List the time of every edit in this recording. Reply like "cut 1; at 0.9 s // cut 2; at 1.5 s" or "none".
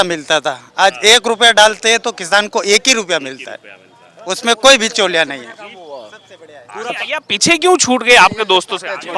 none